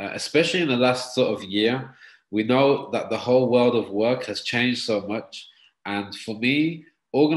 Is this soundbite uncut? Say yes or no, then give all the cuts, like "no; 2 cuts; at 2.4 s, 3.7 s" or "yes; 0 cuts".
yes; 0 cuts